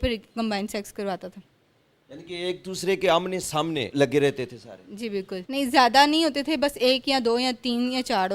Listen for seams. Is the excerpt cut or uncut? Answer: cut